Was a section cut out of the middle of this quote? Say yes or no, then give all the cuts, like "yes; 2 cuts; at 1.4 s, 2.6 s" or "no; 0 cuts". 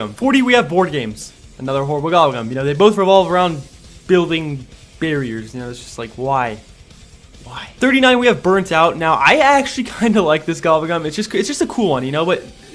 no; 0 cuts